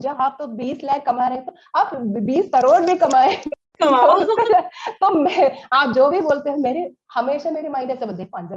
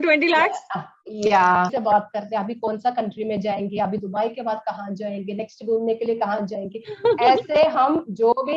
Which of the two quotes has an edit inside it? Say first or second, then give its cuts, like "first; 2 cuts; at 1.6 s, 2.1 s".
second; 1 cut; at 1.7 s